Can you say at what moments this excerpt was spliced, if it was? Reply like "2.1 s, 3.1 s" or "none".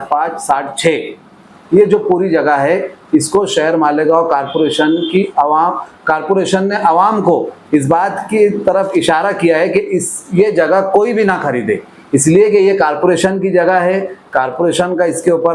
none